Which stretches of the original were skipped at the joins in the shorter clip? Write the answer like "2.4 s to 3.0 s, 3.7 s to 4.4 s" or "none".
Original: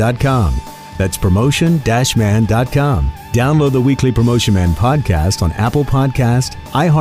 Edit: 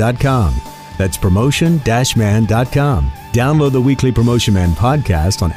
none